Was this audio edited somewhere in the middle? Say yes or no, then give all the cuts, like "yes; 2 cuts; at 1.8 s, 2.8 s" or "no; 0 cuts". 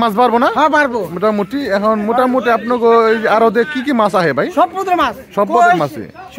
no; 0 cuts